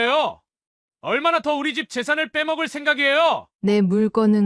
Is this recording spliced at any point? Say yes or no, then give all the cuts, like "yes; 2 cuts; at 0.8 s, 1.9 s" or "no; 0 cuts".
yes; 1 cut; at 3.5 s